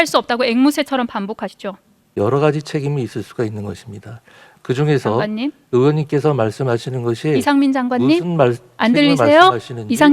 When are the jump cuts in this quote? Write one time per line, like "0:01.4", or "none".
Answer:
0:02.0